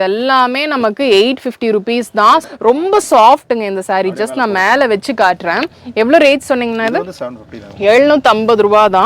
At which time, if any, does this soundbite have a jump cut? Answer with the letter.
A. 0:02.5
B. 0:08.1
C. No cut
A